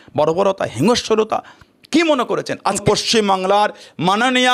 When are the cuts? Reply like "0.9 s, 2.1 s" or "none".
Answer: 2.8 s

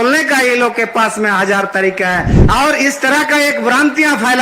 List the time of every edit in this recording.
2.3 s

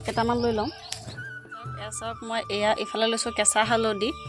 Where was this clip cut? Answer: 1.1 s

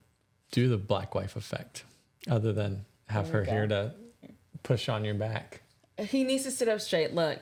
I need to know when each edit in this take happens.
none

